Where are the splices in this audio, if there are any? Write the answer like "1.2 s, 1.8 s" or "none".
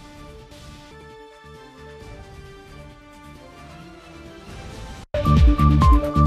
5.1 s